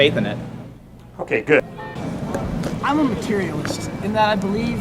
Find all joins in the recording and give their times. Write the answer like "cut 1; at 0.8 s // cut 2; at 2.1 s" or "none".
cut 1; at 1.6 s